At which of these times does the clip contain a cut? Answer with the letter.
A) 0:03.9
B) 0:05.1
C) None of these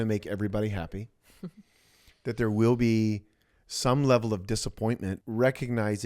B